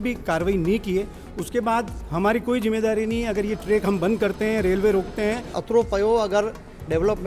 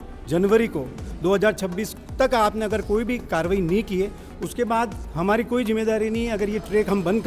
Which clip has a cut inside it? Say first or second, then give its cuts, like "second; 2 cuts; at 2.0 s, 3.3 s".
first; 1 cut; at 5.6 s